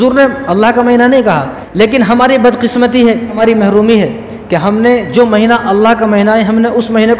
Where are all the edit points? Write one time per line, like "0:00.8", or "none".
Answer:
0:01.6
0:03.4